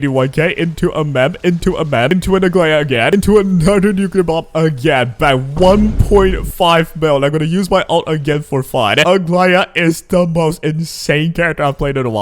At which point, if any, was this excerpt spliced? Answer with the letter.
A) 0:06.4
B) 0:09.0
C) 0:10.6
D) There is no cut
B